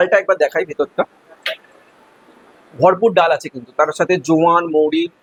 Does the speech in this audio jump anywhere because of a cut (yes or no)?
no